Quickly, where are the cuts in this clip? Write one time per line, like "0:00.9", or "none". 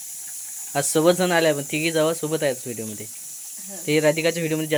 none